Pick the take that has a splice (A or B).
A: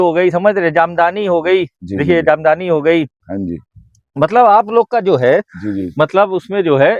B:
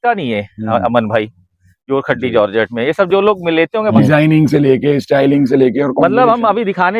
B